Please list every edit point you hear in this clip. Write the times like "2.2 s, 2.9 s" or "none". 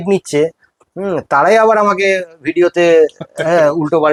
none